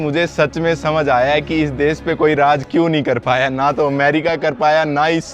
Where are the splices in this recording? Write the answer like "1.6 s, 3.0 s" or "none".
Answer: none